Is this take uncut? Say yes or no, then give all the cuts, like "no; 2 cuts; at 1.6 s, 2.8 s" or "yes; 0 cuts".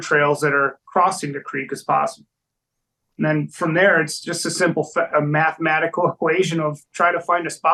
yes; 0 cuts